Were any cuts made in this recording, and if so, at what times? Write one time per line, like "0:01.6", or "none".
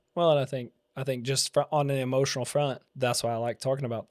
0:02.9